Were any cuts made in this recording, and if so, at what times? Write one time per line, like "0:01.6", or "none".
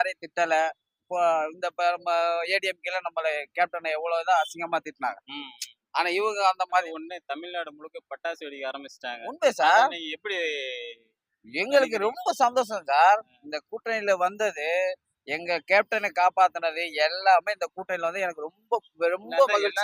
0:06.9